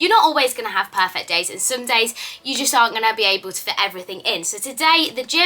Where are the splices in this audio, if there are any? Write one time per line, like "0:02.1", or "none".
none